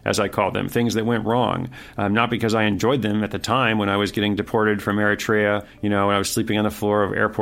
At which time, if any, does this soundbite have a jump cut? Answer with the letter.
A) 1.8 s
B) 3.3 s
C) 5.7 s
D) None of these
C